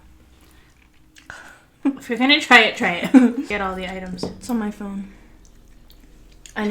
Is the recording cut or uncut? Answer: cut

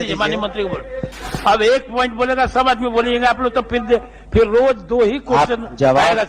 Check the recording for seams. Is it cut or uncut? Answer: uncut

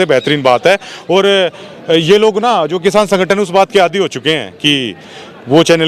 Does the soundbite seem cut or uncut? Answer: uncut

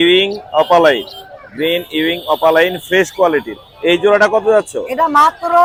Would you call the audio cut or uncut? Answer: uncut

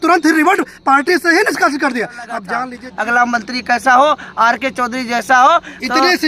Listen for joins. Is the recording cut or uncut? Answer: cut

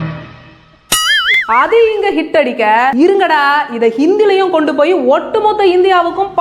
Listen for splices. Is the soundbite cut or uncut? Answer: cut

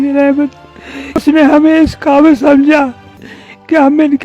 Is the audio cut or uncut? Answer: cut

